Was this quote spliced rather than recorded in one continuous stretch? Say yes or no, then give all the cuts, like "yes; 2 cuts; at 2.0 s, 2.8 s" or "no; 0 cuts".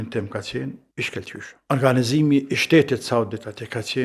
yes; 1 cut; at 1.6 s